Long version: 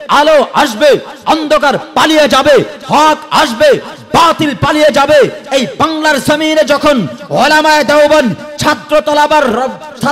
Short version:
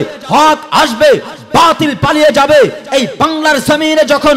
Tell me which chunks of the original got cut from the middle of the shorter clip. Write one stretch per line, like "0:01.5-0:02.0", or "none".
none